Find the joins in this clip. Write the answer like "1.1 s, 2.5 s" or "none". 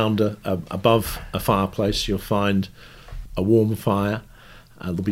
3.2 s